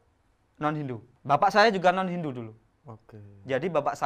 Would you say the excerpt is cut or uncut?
cut